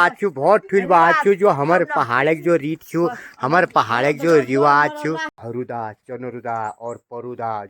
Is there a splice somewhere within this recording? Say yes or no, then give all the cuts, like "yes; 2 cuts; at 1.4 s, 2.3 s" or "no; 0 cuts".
yes; 1 cut; at 5.3 s